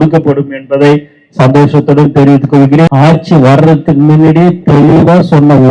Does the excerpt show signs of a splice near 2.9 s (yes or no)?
yes